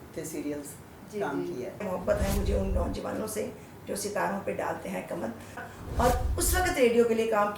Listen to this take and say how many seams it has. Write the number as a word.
two